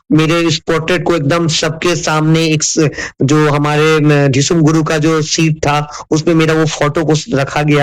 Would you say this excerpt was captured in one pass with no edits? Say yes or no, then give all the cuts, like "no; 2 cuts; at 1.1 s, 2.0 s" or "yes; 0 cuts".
yes; 0 cuts